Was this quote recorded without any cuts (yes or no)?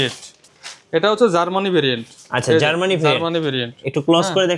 yes